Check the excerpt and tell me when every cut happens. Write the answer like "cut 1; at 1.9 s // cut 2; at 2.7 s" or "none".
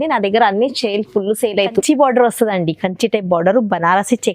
cut 1; at 1.7 s

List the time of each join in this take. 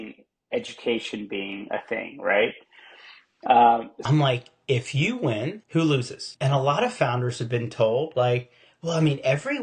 cut 1; at 4.0 s // cut 2; at 5.6 s // cut 3; at 6.2 s

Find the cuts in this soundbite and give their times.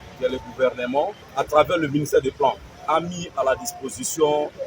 cut 1; at 1.2 s

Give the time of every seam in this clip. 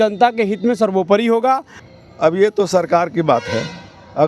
cut 1; at 1.8 s

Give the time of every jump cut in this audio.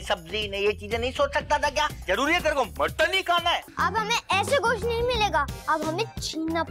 cut 1; at 3.7 s

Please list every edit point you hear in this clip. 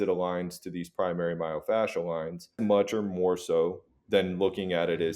cut 1; at 2.6 s

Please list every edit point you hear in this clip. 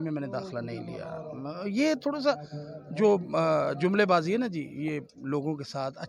none

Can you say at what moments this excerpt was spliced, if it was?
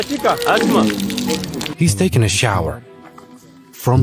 cut 1; at 1.7 s

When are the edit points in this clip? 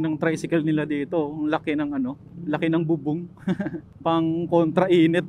none

